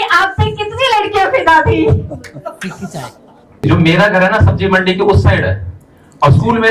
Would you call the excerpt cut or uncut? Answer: cut